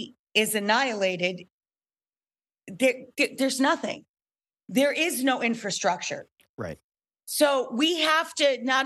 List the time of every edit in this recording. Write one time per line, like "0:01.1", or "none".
none